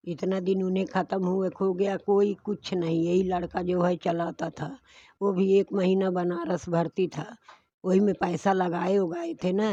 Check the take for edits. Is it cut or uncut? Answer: uncut